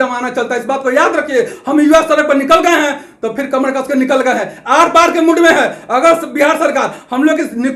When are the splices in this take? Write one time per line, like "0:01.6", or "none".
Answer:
none